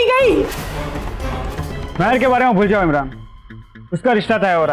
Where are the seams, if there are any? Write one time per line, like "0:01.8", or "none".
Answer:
0:01.8